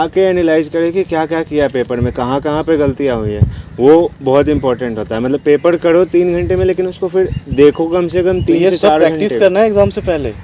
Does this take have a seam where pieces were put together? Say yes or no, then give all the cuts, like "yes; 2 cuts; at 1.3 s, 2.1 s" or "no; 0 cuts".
no; 0 cuts